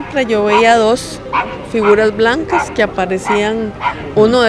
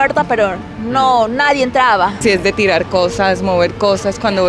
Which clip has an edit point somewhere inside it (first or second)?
second